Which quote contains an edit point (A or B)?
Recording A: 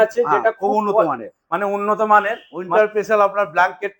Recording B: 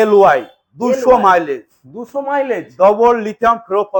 A